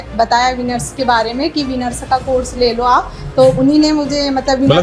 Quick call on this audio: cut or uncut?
uncut